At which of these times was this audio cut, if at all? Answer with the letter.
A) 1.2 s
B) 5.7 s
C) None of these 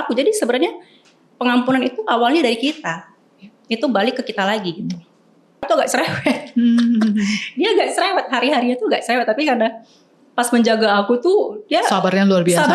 B